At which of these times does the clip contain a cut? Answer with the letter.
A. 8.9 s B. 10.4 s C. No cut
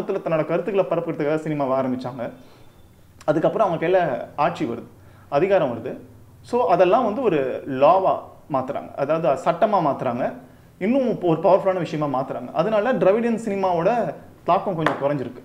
C